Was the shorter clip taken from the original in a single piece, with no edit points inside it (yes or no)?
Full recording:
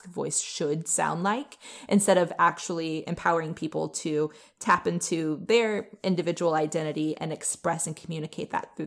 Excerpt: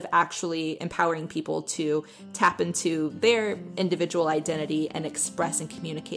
yes